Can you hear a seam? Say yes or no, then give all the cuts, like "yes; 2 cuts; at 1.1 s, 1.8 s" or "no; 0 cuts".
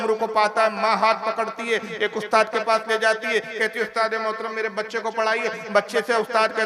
no; 0 cuts